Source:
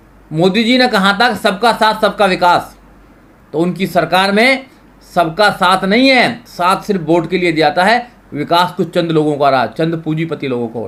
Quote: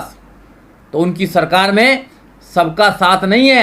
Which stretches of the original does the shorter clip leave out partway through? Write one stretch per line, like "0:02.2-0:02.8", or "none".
none